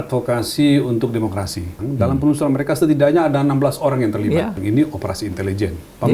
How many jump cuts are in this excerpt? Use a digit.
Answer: 2